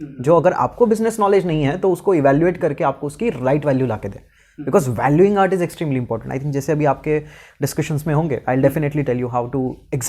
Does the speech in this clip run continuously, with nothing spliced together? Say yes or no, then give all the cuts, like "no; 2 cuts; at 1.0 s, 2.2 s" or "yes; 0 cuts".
yes; 0 cuts